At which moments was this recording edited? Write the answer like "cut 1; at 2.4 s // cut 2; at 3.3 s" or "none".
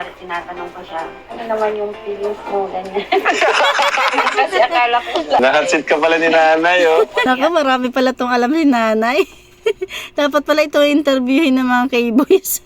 cut 1; at 5.4 s // cut 2; at 7.2 s